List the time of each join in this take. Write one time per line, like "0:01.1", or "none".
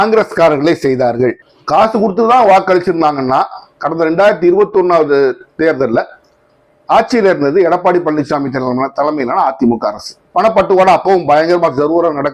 0:01.5